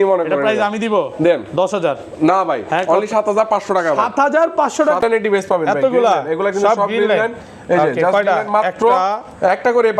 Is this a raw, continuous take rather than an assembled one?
no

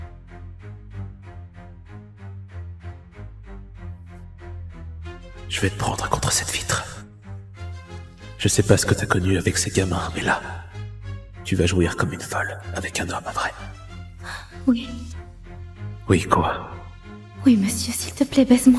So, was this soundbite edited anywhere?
no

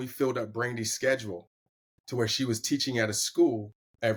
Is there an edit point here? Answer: no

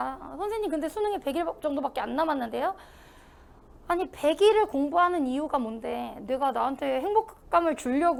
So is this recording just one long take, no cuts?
yes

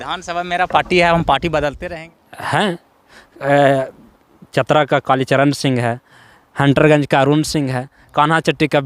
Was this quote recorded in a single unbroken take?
no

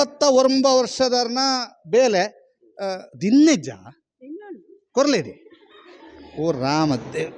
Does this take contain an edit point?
no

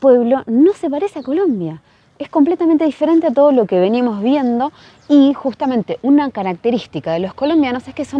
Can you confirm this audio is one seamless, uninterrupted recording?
yes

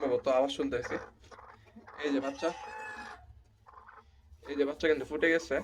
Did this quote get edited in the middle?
no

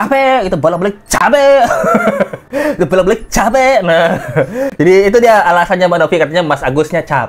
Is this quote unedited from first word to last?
yes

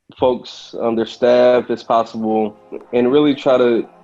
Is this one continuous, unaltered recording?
no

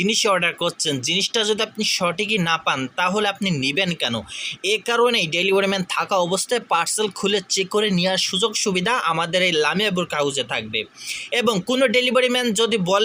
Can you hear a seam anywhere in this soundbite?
no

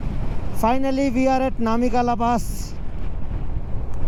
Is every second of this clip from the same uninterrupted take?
yes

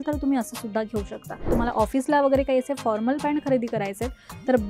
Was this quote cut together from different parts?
yes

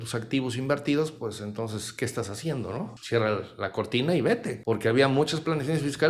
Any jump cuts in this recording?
yes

